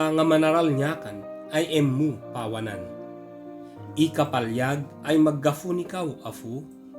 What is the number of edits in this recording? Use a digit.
2